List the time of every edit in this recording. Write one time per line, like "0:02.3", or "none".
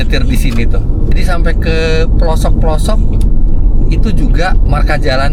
0:01.1